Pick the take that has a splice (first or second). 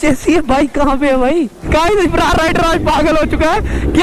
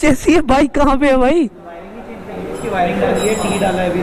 first